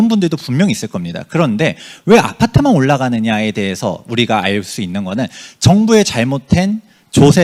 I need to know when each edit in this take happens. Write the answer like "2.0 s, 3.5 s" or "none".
none